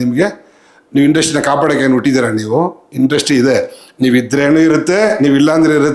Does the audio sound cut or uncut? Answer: uncut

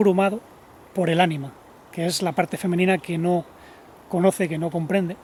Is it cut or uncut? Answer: uncut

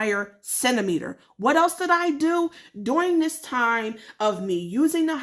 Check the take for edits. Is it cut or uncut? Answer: uncut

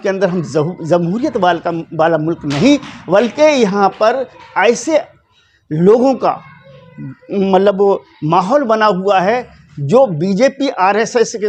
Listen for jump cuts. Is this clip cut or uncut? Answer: uncut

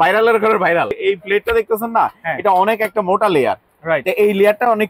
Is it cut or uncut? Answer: cut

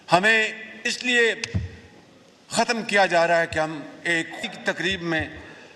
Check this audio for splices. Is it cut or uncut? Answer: cut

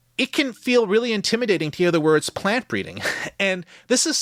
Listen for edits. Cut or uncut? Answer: uncut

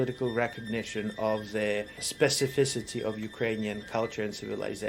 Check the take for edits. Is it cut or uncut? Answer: cut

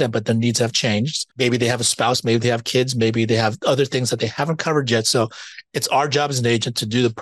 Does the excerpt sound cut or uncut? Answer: cut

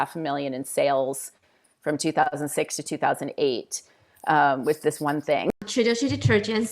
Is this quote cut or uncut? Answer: cut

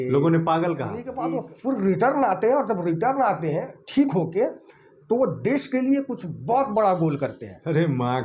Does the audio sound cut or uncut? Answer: cut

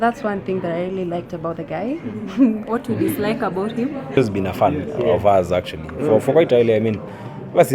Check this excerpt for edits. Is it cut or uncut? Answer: cut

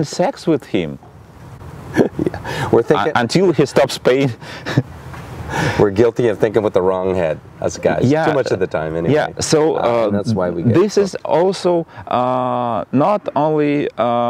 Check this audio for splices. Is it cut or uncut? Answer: uncut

